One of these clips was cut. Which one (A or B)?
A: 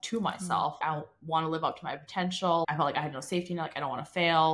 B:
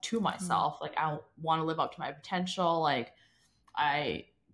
A